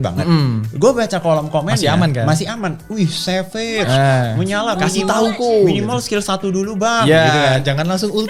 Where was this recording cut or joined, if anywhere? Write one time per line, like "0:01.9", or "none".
none